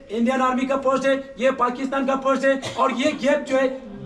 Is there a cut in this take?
no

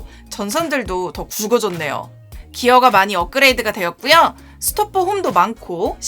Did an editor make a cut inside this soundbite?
yes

